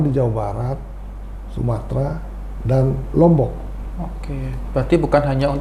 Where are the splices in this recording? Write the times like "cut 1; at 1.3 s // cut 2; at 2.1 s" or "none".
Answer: none